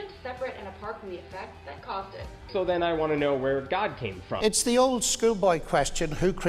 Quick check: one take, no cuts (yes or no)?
no